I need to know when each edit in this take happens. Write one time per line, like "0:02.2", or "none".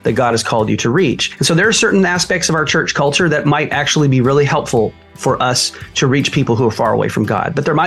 0:01.3